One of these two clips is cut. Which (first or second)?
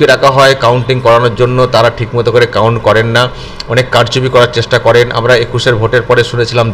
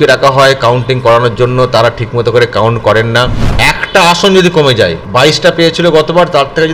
second